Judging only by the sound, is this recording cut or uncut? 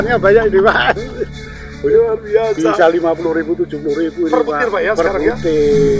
uncut